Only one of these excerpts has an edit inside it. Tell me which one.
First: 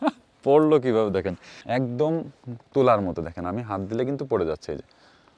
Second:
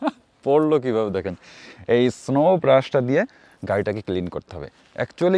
first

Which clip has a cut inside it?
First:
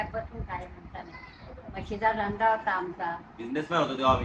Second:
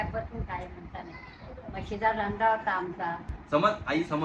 second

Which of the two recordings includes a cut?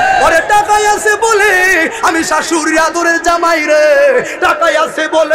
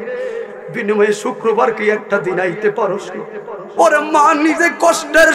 second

